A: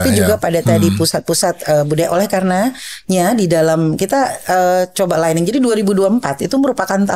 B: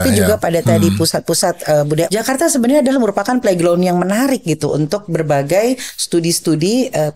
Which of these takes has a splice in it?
B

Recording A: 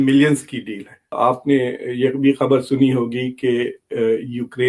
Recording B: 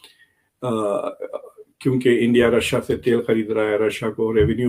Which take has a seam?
A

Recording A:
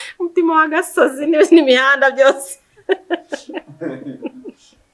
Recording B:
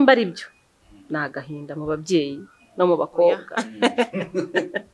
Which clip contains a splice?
B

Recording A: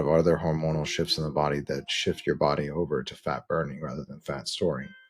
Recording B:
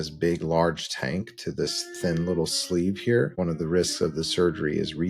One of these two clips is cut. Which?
B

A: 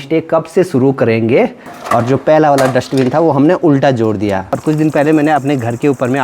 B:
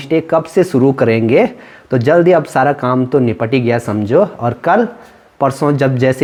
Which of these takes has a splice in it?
A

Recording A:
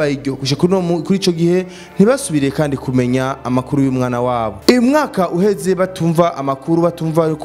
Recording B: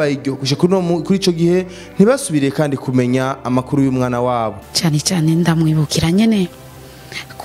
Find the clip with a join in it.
B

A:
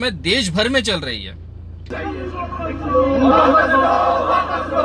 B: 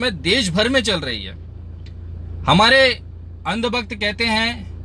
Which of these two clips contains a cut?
A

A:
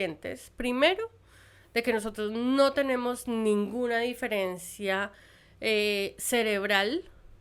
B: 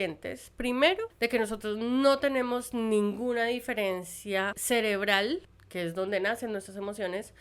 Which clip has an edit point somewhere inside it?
B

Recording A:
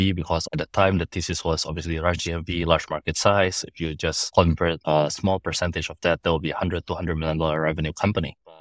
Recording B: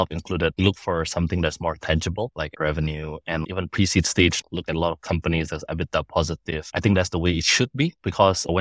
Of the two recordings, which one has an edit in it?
B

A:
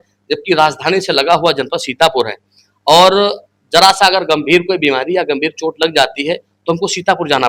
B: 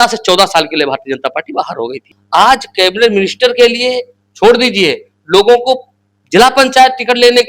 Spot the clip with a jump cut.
B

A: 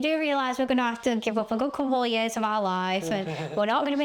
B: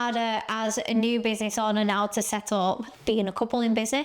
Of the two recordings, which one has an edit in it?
B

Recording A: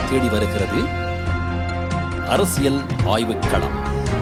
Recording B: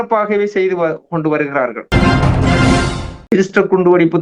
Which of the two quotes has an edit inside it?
B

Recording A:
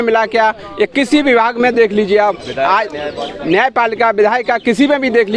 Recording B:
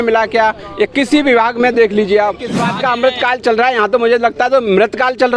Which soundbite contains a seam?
B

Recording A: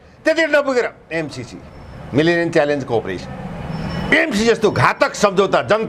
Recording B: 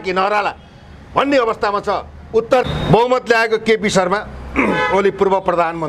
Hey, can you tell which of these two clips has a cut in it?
B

